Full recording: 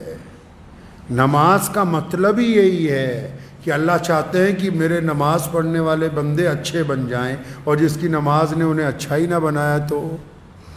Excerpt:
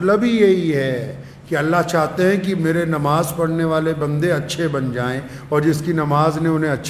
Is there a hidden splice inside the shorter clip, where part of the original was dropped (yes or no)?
no